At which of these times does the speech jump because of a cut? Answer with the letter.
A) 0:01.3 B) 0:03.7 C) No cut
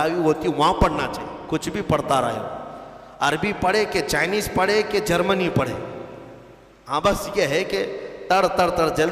A